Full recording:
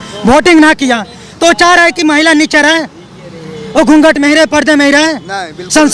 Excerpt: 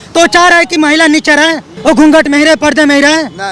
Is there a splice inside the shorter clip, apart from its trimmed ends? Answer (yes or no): yes